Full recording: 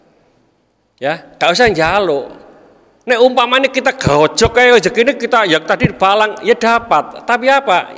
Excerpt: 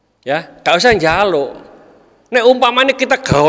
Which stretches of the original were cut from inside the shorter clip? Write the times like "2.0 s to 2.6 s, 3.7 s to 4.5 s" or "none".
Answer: none